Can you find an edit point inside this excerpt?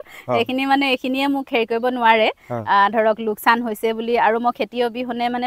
no; 0 cuts

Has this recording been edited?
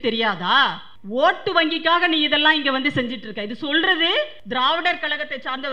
yes; 2 cuts; at 0.9 s, 4.4 s

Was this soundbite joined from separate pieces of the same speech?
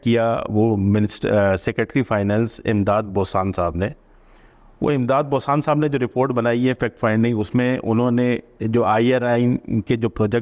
no; 0 cuts

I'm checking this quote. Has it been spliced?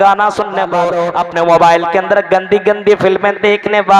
yes; 1 cut; at 1.0 s

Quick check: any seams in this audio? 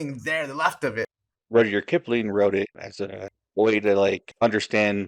yes; 3 cuts; at 1.1 s, 2.9 s, 4.2 s

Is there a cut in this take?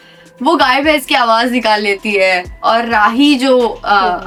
no; 0 cuts

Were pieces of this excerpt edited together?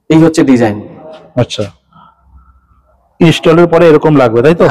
no; 0 cuts

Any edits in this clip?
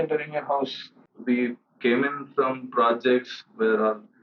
yes; 1 cut; at 1.0 s

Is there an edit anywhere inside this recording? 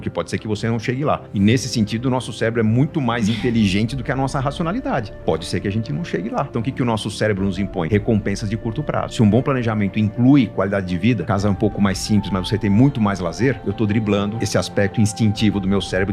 yes; 7 cuts; at 1.3 s, 6.5 s, 7.9 s, 9.1 s, 11.2 s, 13.6 s, 14.4 s

